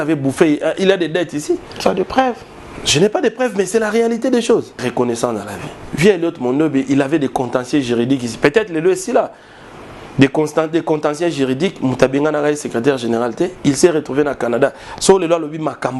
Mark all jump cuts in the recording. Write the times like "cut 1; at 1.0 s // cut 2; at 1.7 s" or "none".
cut 1; at 4.8 s